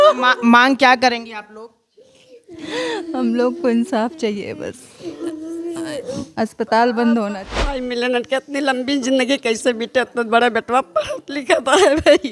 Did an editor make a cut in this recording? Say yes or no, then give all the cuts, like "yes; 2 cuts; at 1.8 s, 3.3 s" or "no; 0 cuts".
yes; 1 cut; at 7.8 s